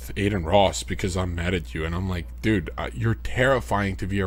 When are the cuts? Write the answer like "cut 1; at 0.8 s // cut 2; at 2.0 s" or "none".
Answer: none